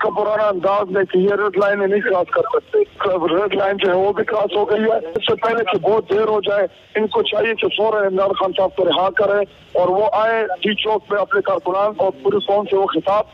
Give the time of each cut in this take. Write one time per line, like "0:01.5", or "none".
0:03.0
0:05.2